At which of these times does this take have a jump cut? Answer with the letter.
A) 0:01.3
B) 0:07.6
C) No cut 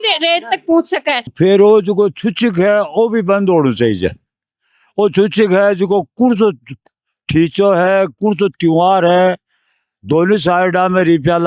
A